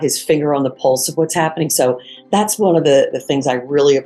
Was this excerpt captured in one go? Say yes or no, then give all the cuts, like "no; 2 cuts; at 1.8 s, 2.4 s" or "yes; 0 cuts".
yes; 0 cuts